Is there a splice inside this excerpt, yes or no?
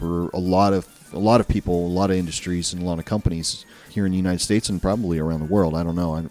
no